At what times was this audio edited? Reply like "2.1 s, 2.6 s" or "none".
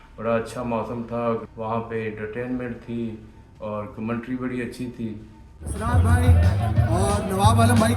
1.4 s